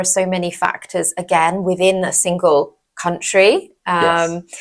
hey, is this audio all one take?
yes; 0 cuts

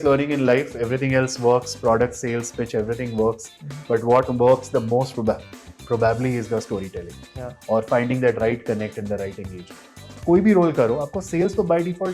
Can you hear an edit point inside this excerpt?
yes; 1 cut; at 10.2 s

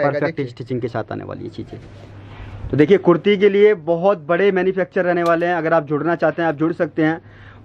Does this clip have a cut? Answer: no; 0 cuts

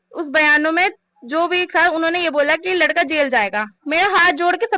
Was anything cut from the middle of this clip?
yes; 1 cut; at 3.7 s

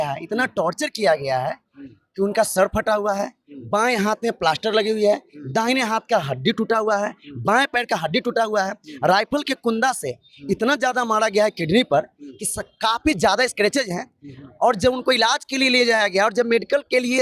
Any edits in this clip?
no; 0 cuts

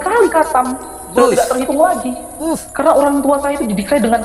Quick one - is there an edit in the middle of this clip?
no; 0 cuts

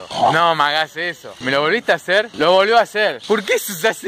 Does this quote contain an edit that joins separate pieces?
yes; 2 cuts; at 2.3 s, 3.2 s

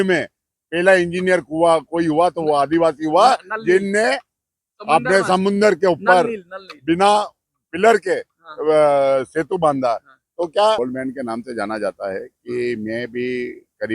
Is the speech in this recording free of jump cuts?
no; 1 cut; at 10.8 s

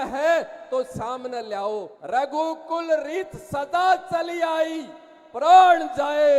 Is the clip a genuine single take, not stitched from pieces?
no; 1 cut; at 1.9 s

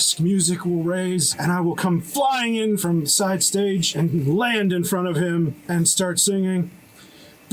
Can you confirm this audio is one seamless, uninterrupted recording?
no; 4 cuts; at 1.3 s, 2.8 s, 3.9 s, 5.6 s

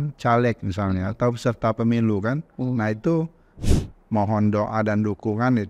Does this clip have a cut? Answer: yes; 1 cut; at 3.6 s

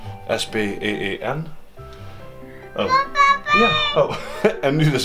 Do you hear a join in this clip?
no; 0 cuts

